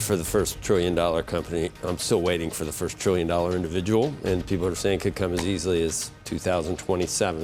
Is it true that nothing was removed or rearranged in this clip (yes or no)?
yes